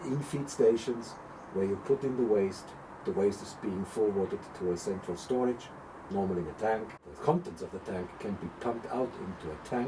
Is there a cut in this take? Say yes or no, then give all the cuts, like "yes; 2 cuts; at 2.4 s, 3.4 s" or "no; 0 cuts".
yes; 1 cut; at 7.1 s